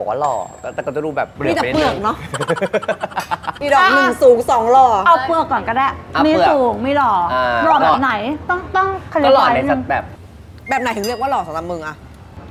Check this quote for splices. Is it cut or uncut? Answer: uncut